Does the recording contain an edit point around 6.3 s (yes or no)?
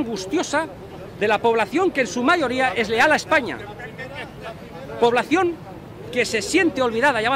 no